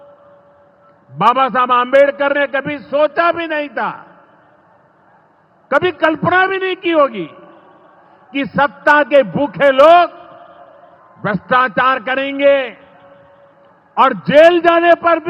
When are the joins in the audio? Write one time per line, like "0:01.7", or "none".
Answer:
none